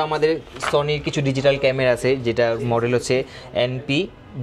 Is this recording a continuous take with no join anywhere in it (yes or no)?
yes